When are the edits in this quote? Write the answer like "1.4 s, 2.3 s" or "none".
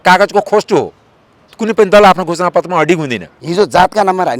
3.3 s